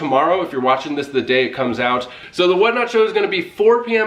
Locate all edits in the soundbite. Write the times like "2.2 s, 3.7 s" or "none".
2.2 s